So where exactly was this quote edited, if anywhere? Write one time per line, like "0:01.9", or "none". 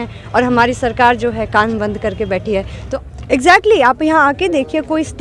0:02.8